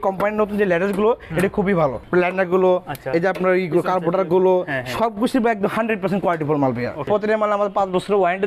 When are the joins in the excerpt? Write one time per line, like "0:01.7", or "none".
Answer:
0:02.0
0:07.1